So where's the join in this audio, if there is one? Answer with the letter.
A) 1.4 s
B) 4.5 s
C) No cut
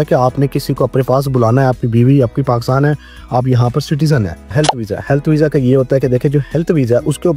B